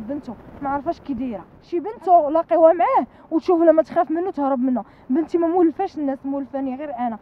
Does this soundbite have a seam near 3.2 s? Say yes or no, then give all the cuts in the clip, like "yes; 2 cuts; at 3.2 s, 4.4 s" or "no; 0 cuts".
no; 1 cut; at 1.6 s